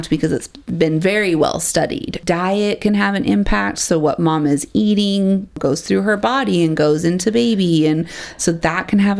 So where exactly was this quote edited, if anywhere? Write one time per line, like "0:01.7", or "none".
0:02.1
0:05.6